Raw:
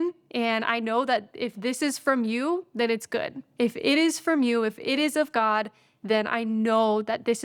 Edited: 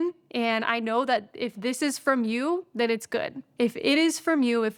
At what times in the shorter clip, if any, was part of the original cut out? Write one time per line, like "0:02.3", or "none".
none